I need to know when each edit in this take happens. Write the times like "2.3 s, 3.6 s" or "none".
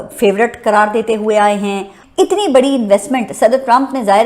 2.0 s